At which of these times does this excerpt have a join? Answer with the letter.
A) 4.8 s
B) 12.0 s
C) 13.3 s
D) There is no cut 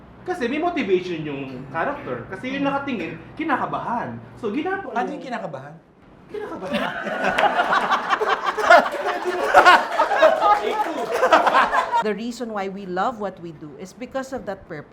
B